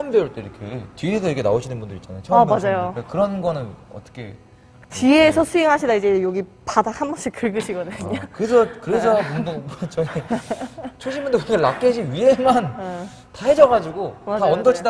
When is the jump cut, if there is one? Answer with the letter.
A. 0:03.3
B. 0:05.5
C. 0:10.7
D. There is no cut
D